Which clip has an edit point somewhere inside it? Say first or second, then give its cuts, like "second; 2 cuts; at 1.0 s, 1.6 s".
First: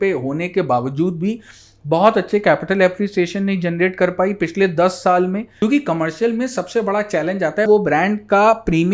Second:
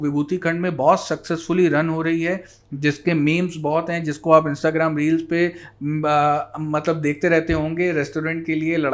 first; 2 cuts; at 5.5 s, 7.7 s